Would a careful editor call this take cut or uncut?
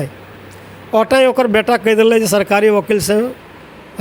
uncut